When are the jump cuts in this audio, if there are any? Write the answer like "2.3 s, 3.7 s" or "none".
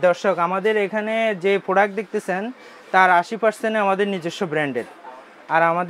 none